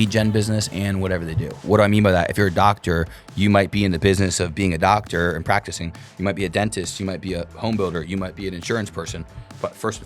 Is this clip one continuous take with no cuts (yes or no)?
no